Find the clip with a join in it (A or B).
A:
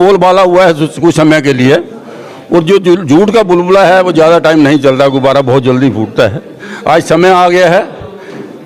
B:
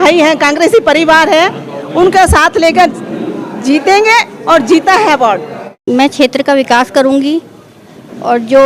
B